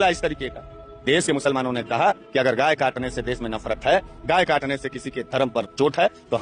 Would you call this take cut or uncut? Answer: uncut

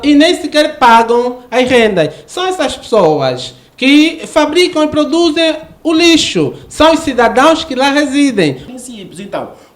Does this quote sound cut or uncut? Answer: cut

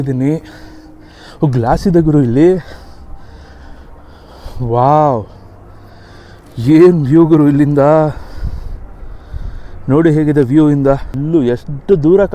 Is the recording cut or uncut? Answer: cut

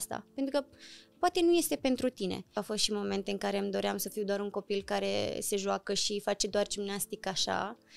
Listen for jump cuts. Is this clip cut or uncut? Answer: cut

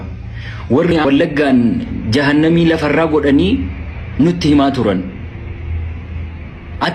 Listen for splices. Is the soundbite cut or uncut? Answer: cut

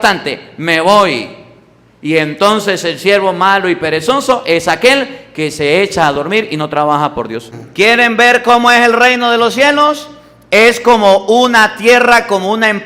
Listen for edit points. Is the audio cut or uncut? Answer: cut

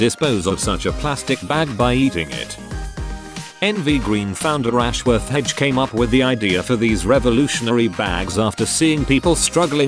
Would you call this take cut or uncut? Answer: uncut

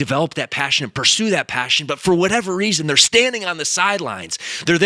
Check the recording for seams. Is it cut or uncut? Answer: uncut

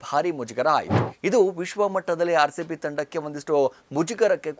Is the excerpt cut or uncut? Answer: cut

